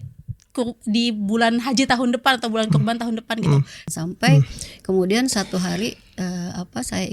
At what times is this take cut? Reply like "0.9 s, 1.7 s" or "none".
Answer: 3.8 s

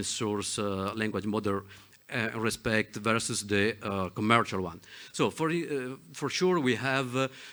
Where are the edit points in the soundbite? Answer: none

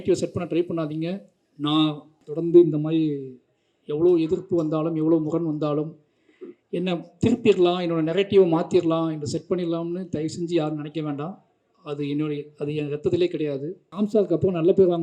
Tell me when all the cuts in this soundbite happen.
2.2 s, 13.8 s

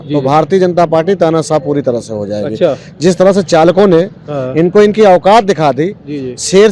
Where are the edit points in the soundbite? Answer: none

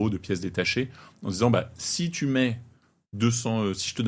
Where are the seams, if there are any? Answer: none

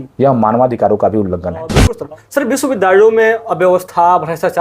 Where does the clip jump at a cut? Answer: 1.9 s

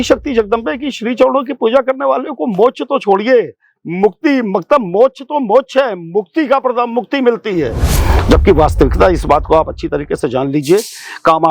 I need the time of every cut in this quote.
7.8 s

